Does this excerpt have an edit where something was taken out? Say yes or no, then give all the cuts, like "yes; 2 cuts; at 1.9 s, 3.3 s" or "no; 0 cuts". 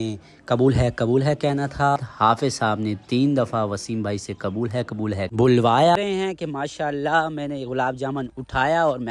yes; 2 cuts; at 2.0 s, 5.9 s